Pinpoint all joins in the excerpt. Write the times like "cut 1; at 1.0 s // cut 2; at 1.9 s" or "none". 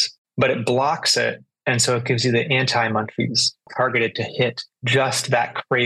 cut 1; at 3.7 s